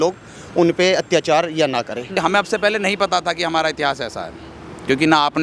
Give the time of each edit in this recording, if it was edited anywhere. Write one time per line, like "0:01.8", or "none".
0:02.2